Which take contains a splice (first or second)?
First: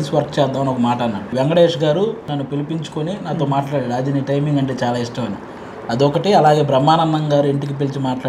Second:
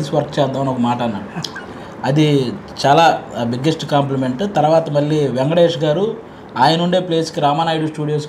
first